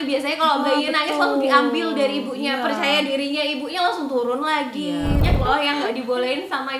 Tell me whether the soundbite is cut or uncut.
cut